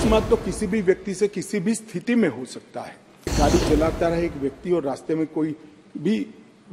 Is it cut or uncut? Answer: cut